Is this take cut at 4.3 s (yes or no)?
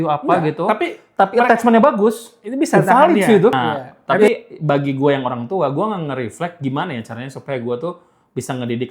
yes